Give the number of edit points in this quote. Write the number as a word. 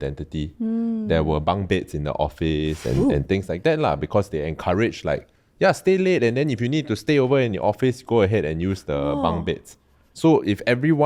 zero